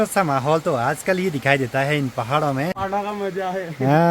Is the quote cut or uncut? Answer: cut